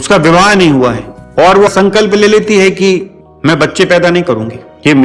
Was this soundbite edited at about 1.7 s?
yes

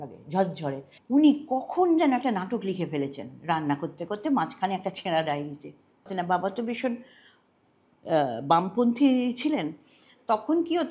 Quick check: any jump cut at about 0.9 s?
yes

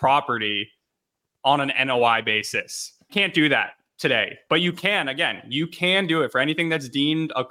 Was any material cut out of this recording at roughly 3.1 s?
yes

